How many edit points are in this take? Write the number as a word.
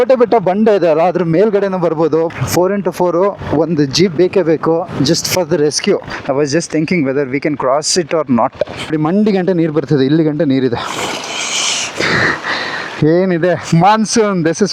three